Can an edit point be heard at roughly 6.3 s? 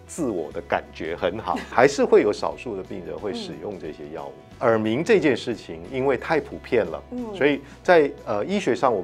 no; 2 cuts; at 1.7 s, 4.5 s

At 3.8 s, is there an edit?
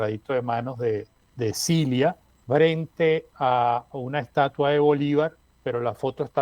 no; 3 cuts; at 1.2 s, 2.3 s, 5.5 s

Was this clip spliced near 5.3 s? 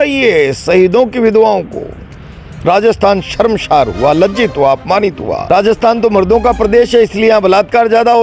yes; 1 cut; at 5.3 s

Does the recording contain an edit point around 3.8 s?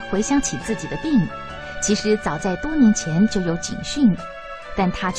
no; 1 cut; at 2.4 s

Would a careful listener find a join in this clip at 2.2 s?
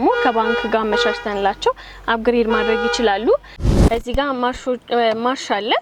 no; 1 cut; at 3.7 s

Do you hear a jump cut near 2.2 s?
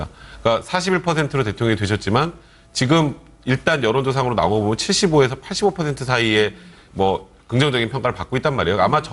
no; 0 cuts

